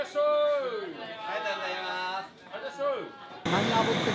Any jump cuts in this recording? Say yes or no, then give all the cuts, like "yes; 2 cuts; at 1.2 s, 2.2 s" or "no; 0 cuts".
yes; 1 cut; at 3.2 s